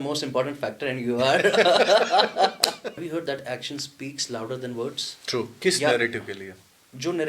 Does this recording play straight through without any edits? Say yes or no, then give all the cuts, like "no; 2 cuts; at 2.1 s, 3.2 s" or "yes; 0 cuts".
no; 2 cuts; at 2.9 s, 5.5 s